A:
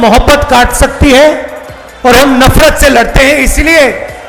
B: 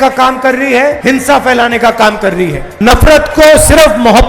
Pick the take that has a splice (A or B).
B